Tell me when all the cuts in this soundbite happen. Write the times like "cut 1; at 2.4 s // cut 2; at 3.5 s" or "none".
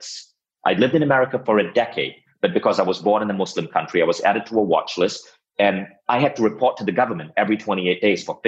none